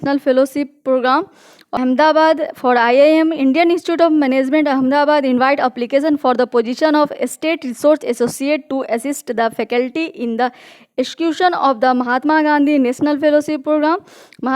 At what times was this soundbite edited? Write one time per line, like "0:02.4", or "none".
0:01.8